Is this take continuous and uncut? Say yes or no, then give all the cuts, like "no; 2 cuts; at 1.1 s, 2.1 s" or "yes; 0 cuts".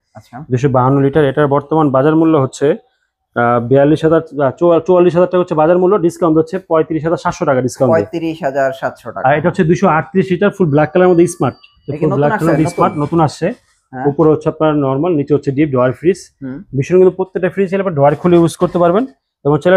yes; 0 cuts